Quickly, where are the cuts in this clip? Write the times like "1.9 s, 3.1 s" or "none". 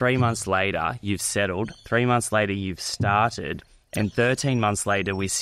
none